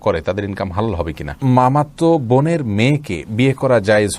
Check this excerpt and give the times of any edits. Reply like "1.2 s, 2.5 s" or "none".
1.4 s

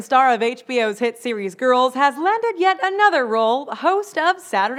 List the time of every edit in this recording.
none

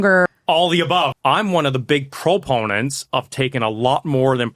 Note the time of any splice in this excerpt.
0.9 s

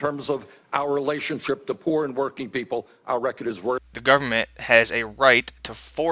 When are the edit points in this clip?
none

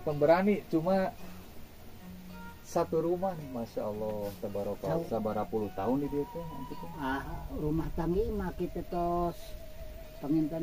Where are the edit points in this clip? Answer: 5.0 s

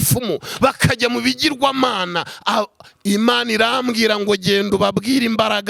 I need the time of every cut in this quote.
none

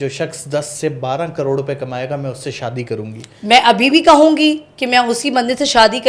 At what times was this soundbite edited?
none

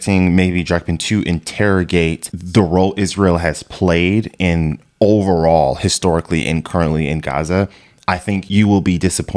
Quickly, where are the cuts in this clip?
none

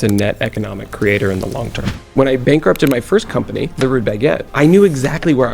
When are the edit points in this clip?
2.0 s, 3.7 s, 4.5 s

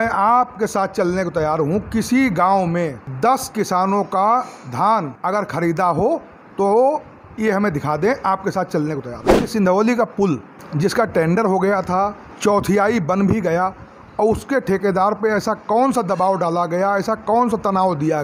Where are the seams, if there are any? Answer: 9.4 s

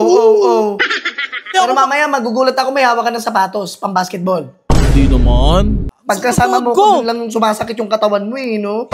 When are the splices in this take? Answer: 1.6 s, 5.9 s

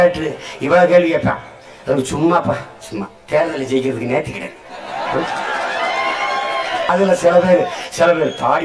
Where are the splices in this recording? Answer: 6.9 s

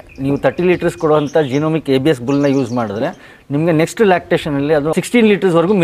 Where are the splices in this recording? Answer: 4.9 s

